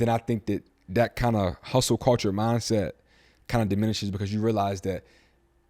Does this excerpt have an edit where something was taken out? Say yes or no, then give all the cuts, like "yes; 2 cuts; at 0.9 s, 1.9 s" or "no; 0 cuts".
no; 0 cuts